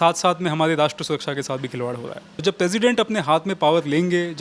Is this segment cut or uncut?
cut